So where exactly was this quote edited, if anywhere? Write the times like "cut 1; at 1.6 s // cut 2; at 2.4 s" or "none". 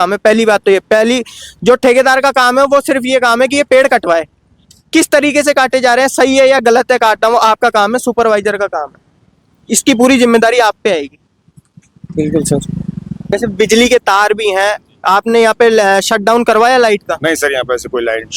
cut 1; at 13.3 s